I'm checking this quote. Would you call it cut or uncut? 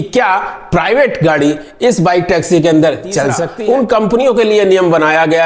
cut